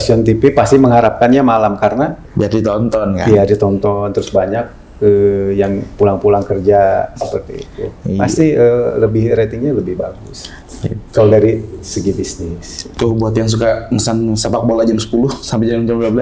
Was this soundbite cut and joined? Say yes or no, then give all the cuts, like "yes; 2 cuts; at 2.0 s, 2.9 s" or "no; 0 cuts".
yes; 2 cuts; at 2.2 s, 12.8 s